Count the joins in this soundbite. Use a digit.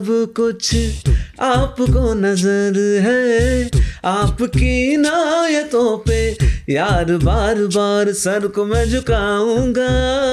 0